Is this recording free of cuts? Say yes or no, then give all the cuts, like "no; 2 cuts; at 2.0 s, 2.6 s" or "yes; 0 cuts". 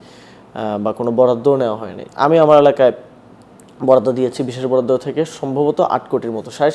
no; 1 cut; at 2.0 s